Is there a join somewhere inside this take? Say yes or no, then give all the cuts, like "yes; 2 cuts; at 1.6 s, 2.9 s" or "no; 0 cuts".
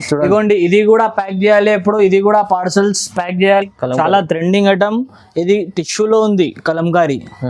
yes; 1 cut; at 3.6 s